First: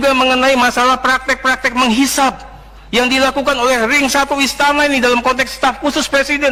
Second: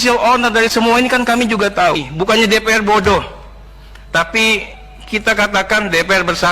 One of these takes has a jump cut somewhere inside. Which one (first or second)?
second